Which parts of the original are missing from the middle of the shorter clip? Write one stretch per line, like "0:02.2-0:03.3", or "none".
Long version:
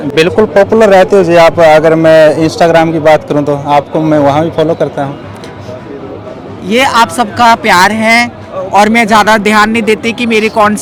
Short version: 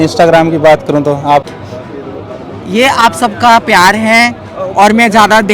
0:03.9-0:05.4